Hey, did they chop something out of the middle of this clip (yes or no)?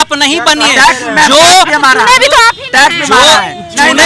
no